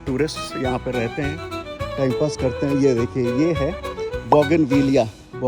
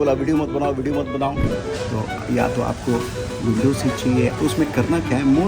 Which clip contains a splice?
second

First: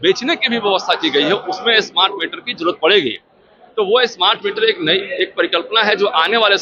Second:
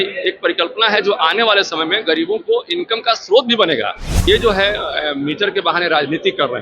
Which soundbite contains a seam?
second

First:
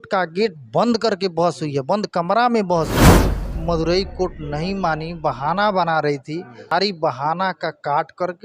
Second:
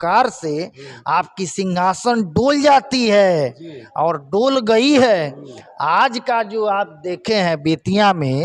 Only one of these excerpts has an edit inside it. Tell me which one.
first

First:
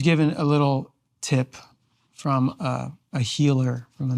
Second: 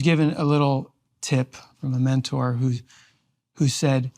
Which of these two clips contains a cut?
second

